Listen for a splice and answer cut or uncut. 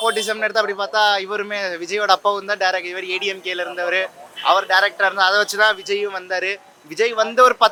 uncut